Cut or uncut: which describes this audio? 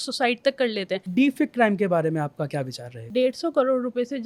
cut